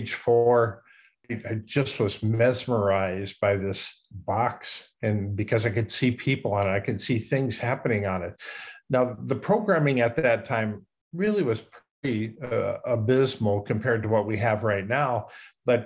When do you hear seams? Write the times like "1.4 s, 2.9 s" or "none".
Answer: 1.2 s, 3.9 s